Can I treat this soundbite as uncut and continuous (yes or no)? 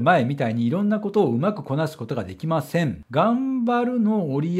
no